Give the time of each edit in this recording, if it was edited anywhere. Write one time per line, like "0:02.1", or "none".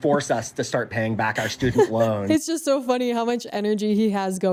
none